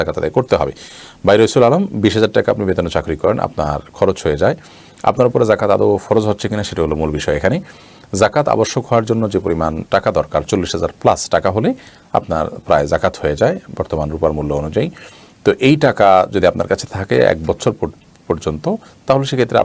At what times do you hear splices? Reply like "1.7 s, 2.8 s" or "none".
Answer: none